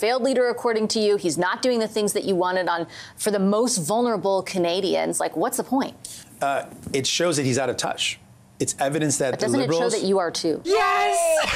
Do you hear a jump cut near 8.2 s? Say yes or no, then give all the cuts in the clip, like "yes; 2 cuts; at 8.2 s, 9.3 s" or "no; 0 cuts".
no; 2 cuts; at 6.2 s, 10.6 s